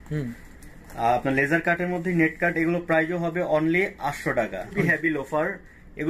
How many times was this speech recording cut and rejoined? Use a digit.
1